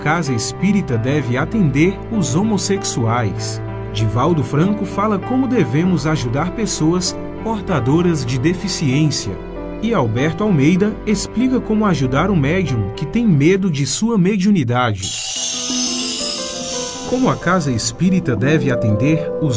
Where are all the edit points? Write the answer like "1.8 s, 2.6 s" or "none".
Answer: none